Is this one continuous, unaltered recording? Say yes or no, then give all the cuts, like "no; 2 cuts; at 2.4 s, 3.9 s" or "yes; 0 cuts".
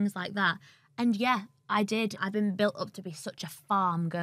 no; 1 cut; at 2.2 s